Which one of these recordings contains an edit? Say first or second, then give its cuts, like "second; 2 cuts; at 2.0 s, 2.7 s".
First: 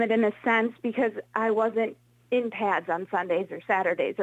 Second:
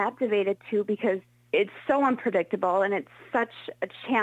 second; 1 cut; at 1.3 s